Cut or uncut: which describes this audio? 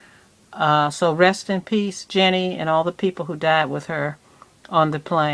cut